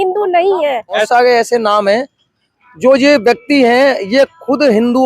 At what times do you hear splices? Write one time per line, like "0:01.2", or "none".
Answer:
0:01.0

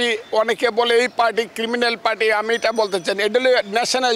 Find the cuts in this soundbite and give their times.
none

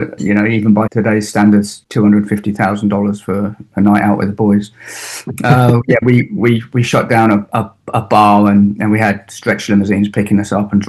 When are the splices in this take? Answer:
0:00.9
0:01.8

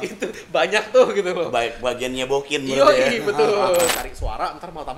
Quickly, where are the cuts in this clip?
0:03.9

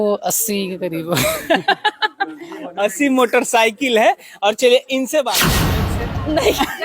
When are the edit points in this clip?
0:05.6

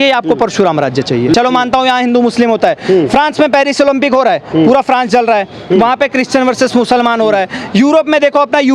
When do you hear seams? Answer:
0:01.3

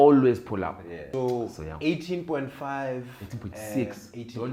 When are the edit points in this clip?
0:00.9

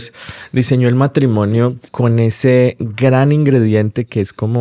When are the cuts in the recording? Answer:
0:01.8

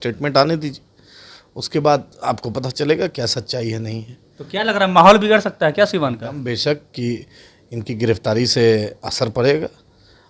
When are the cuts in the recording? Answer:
none

